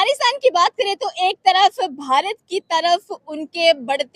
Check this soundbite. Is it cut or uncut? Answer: uncut